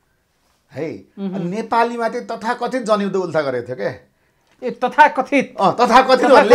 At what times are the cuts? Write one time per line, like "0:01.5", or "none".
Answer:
none